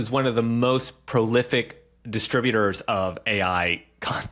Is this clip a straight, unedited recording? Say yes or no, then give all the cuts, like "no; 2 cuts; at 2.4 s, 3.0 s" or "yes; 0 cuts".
yes; 0 cuts